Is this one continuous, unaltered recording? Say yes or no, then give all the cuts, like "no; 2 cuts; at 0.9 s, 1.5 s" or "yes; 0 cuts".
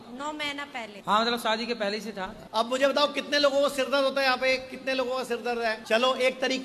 yes; 0 cuts